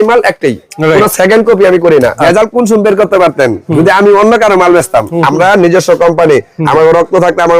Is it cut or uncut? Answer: cut